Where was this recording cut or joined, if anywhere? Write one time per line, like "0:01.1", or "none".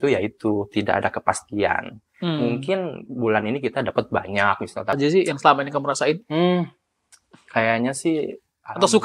0:05.0